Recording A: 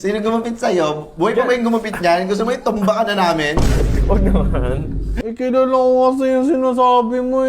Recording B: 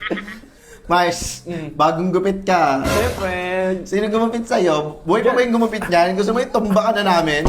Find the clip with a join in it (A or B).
A